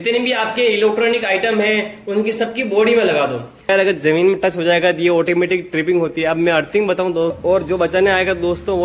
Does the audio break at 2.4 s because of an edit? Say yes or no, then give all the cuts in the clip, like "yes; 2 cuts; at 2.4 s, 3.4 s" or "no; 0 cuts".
no; 2 cuts; at 3.7 s, 7.4 s